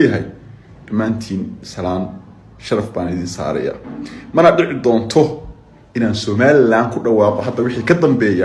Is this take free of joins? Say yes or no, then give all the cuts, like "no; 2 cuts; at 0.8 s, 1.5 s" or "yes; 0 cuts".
yes; 0 cuts